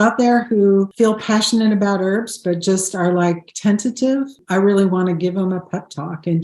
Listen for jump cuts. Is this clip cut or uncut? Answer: cut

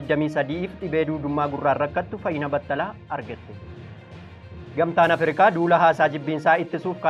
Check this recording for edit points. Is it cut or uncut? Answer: uncut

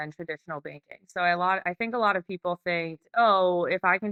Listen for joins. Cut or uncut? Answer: uncut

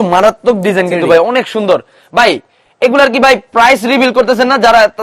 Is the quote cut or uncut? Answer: uncut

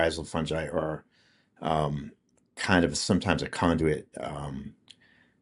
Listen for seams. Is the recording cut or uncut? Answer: uncut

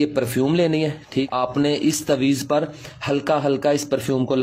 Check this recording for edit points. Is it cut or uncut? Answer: cut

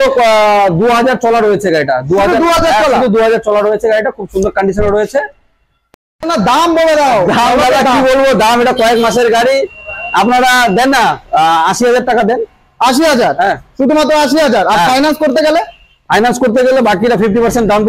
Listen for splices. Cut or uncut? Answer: uncut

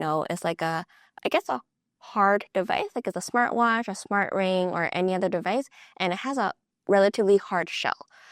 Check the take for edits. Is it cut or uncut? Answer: cut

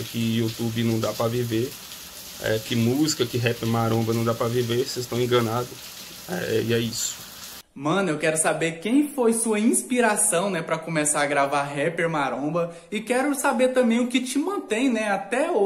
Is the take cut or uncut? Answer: uncut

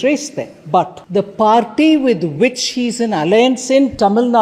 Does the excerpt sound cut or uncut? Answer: cut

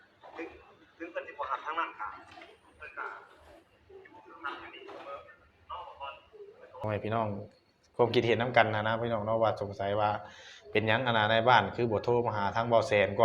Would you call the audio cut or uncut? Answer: cut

